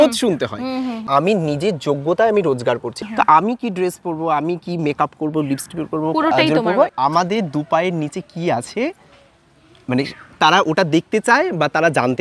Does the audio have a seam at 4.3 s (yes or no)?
no